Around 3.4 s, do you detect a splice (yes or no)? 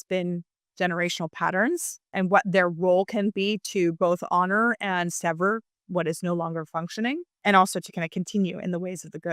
no